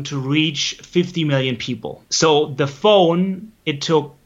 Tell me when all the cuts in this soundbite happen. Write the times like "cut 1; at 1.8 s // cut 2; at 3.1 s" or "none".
cut 1; at 2.0 s